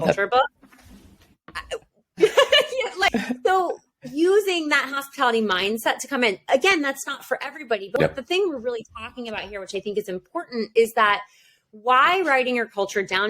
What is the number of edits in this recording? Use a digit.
2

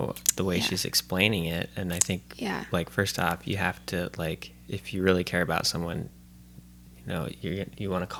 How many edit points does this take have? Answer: 0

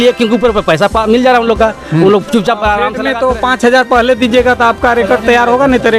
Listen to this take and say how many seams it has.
1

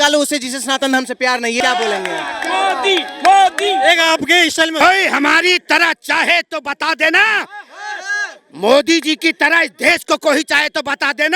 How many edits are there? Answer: 1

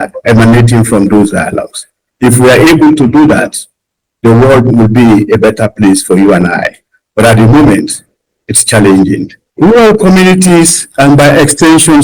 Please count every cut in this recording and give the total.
1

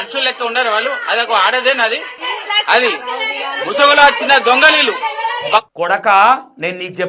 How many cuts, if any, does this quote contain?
1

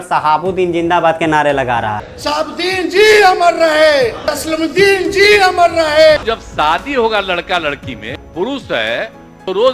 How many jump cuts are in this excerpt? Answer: 2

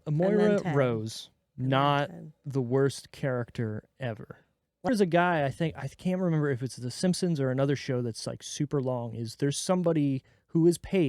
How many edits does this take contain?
1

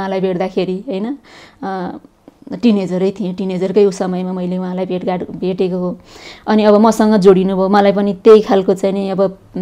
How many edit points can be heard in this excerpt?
0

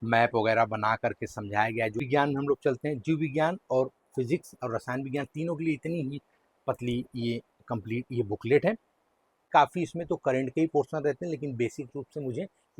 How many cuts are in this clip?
2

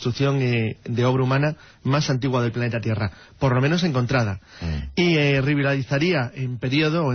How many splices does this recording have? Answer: 0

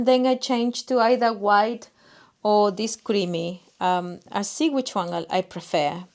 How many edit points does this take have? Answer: 0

